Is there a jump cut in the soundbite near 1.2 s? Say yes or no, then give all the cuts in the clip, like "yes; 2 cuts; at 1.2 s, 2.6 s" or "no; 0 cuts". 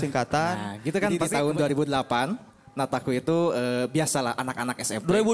yes; 1 cut; at 1.2 s